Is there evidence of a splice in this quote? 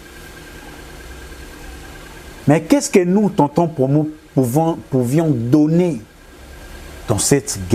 no; 0 cuts

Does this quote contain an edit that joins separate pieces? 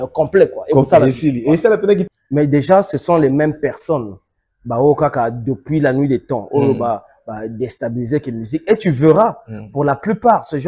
yes; 1 cut; at 2.0 s

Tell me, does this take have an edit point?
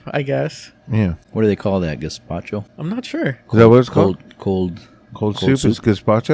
yes; 2 cuts; at 1.2 s, 2.7 s

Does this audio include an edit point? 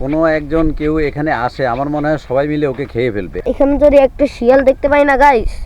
yes; 1 cut; at 3.3 s

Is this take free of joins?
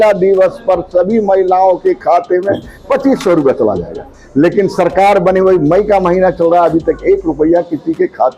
yes; 0 cuts

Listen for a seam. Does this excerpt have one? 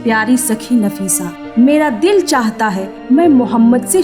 no; 0 cuts

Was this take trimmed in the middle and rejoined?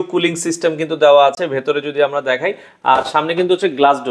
no; 0 cuts

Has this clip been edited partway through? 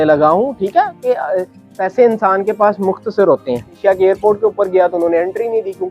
yes; 1 cut; at 3.8 s

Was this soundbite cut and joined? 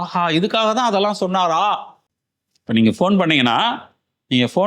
yes; 1 cut; at 2.0 s

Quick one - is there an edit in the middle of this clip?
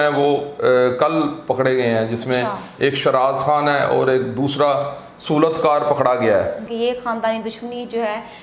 yes; 1 cut; at 6.6 s

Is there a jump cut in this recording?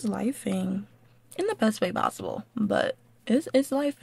no; 0 cuts

